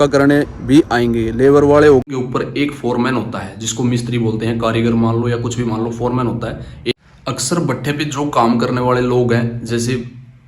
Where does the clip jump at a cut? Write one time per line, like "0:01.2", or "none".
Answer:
0:02.1
0:06.9